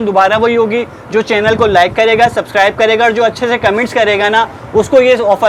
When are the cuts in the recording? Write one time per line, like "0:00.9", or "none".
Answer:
none